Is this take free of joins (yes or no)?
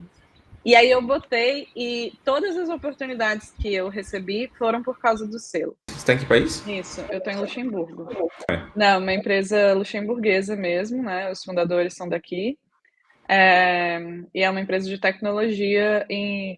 no